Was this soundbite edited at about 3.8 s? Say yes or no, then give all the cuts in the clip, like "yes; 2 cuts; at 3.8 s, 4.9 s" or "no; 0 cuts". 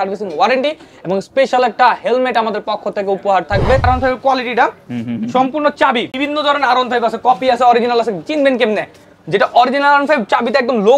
yes; 2 cuts; at 3.8 s, 6.1 s